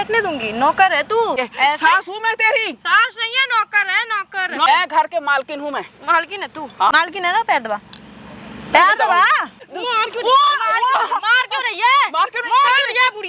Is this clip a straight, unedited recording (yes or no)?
no